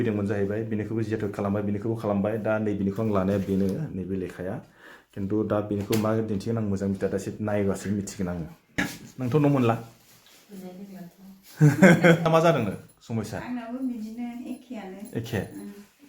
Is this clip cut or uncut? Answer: cut